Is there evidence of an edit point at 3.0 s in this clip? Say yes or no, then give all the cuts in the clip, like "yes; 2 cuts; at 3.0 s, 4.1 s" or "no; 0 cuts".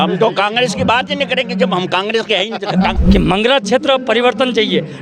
yes; 1 cut; at 3.0 s